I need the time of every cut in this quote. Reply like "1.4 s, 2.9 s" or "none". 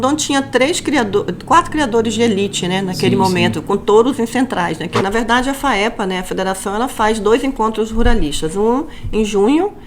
5.0 s